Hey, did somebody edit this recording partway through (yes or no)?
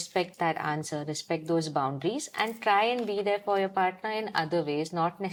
no